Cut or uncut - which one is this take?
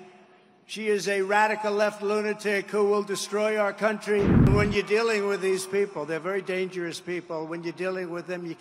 cut